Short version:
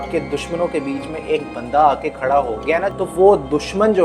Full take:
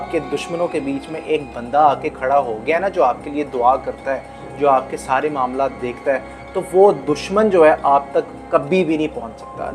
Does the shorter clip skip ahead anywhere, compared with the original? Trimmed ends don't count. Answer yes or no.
yes